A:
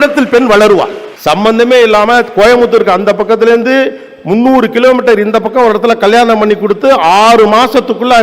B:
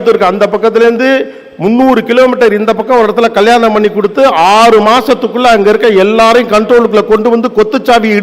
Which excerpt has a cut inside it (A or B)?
A